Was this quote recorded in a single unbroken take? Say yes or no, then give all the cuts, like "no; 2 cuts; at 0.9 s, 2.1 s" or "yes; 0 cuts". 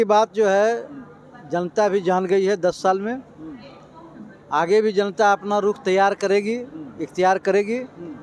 yes; 0 cuts